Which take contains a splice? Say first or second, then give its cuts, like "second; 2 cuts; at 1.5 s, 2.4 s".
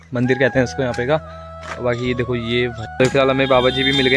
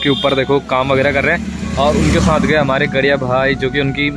first; 1 cut; at 2.8 s